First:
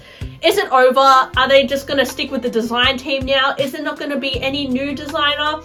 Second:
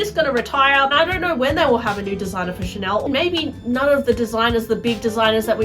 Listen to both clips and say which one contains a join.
second; 2 cuts; at 0.9 s, 3.0 s

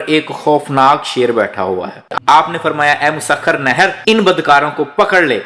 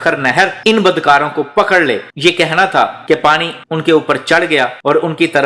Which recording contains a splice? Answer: first; 1 cut; at 2.0 s

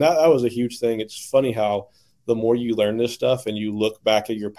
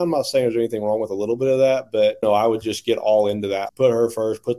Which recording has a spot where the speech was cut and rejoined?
second; 2 cuts; at 2.2 s, 3.7 s

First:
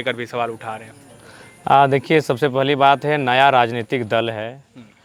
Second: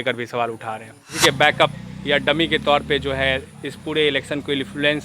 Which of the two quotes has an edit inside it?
second; 1 cut; at 1.4 s

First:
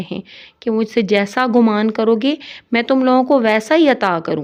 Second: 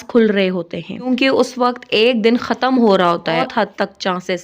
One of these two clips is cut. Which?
second; 2 cuts; at 1.1 s, 3.5 s

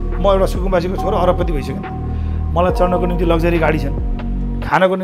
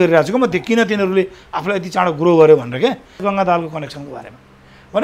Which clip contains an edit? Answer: second; 1 cut; at 3.2 s

